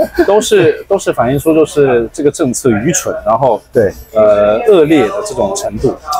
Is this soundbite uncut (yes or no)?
yes